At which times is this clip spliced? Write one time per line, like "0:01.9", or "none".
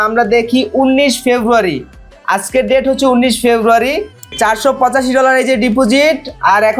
0:04.3